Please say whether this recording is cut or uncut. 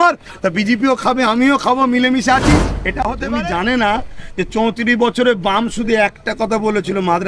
cut